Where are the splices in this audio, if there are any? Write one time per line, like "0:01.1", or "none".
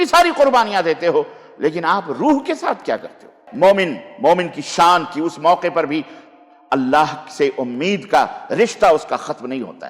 0:03.4